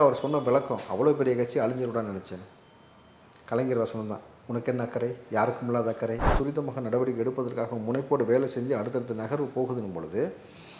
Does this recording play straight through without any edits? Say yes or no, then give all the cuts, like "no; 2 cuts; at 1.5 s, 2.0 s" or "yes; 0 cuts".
no; 1 cut; at 6.4 s